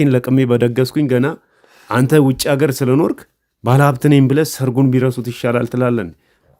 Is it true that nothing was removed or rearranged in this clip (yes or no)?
yes